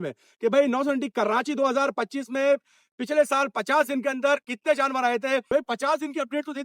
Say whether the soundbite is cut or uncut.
cut